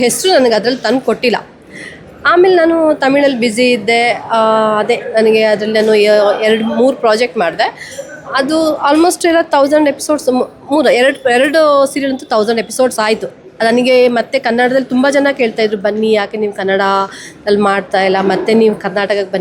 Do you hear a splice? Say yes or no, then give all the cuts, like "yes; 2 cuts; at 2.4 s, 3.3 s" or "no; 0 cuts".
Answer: no; 0 cuts